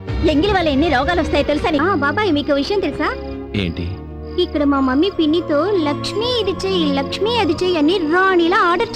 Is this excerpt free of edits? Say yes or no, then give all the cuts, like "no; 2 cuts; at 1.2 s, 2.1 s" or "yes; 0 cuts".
no; 1 cut; at 1.8 s